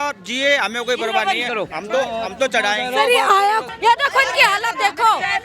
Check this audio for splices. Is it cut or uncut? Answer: cut